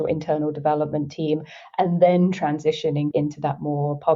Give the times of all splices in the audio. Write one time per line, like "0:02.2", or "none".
0:03.1